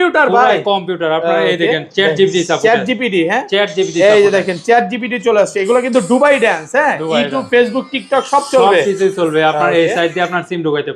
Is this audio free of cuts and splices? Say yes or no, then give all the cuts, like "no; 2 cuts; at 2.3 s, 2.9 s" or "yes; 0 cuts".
yes; 0 cuts